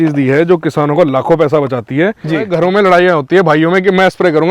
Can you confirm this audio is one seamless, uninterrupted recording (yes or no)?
no